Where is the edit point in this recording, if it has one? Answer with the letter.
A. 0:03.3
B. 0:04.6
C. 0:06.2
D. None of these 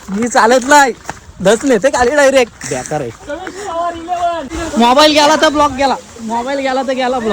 B